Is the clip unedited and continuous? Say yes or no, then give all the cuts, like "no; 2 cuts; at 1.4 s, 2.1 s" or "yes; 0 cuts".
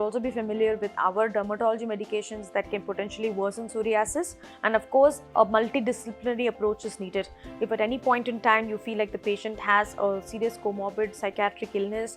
no; 1 cut; at 4.4 s